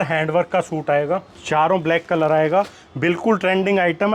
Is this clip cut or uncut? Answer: cut